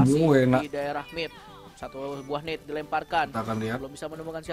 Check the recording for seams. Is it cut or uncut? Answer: uncut